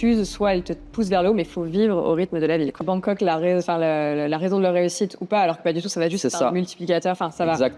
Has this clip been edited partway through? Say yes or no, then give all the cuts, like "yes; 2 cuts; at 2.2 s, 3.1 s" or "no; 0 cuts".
yes; 1 cut; at 2.8 s